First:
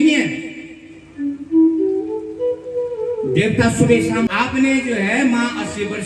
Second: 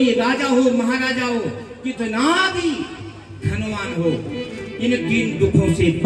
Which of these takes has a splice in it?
first; 1 cut; at 4.3 s

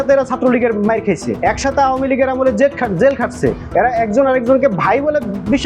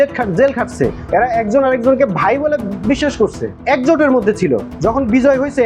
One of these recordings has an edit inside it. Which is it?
first; 1 cut; at 1.3 s

